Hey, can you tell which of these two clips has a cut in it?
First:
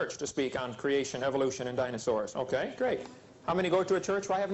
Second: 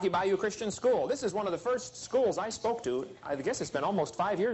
second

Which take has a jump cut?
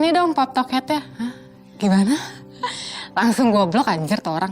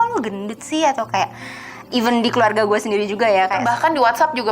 second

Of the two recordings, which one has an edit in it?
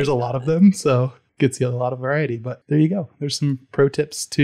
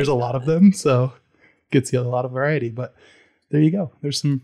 first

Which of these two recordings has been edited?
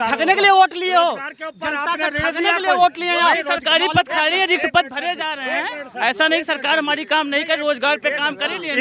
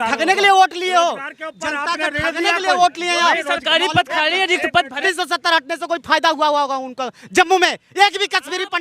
second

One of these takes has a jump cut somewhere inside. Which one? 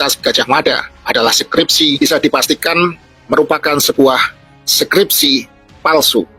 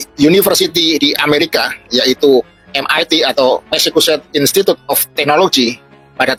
first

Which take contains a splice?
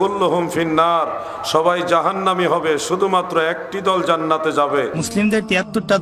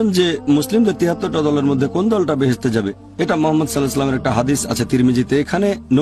first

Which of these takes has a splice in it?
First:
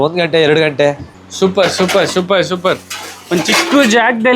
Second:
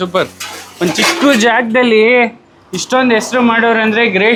first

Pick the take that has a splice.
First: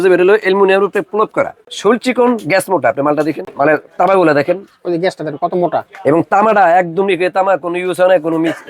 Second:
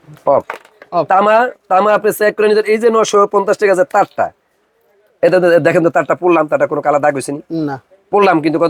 first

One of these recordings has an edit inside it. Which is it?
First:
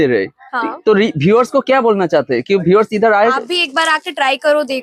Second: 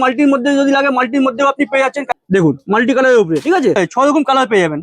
second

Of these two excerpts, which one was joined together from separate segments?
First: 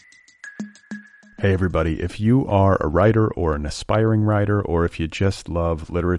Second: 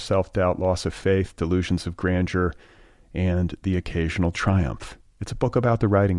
first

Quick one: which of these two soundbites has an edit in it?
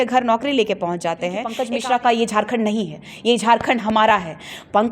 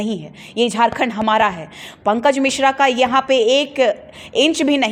first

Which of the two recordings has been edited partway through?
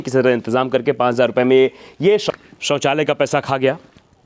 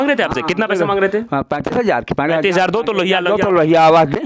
first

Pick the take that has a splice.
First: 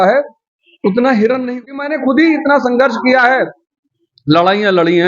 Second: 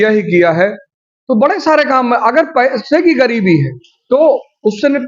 first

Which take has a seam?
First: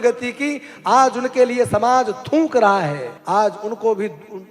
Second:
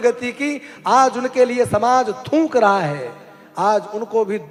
first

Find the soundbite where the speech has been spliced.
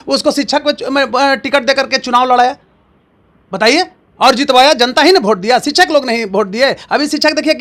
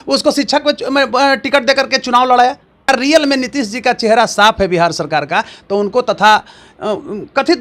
second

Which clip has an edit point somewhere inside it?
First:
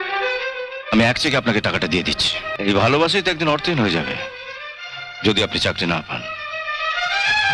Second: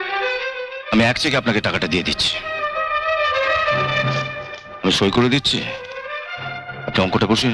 first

